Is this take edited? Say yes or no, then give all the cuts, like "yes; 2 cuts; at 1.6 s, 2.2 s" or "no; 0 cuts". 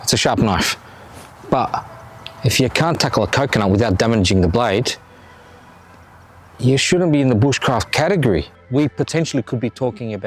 yes; 1 cut; at 8.6 s